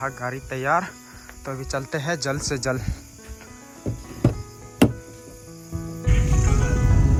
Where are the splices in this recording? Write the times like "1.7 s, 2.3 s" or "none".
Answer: none

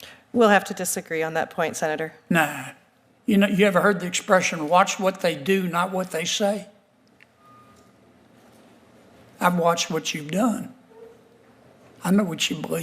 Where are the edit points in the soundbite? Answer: none

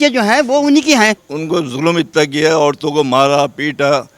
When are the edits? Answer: 1.3 s

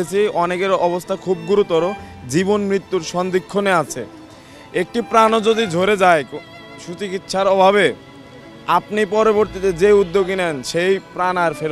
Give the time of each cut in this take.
none

